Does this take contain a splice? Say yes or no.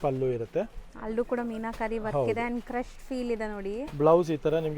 no